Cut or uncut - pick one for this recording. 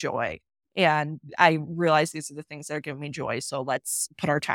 uncut